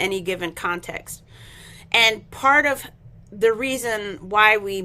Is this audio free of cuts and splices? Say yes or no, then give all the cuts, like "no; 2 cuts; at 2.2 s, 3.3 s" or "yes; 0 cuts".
yes; 0 cuts